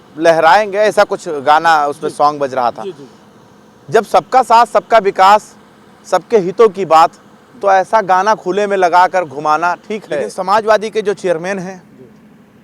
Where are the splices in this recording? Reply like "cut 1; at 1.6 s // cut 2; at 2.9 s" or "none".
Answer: cut 1; at 10.3 s